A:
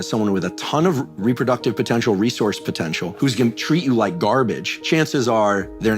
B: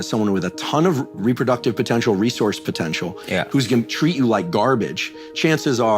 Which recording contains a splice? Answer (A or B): A